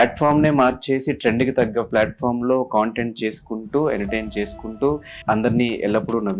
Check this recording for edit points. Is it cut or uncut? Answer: cut